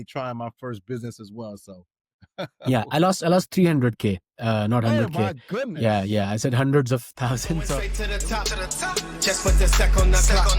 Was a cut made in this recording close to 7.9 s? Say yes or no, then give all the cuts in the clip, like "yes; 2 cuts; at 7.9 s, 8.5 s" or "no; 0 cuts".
yes; 1 cut; at 7.9 s